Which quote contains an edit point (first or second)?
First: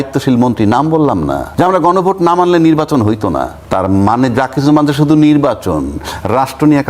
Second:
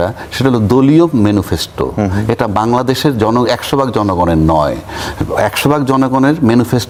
first